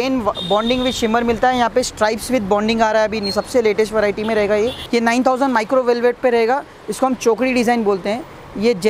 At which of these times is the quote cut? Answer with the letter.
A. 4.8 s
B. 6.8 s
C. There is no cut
A